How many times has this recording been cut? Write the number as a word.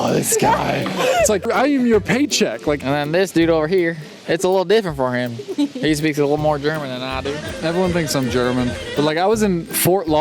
three